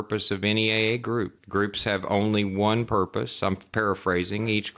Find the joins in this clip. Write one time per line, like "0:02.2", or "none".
0:01.4